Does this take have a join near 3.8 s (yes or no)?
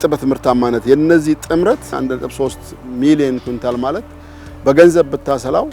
no